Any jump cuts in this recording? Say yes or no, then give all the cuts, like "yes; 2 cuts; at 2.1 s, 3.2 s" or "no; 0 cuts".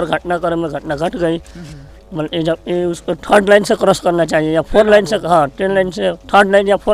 no; 0 cuts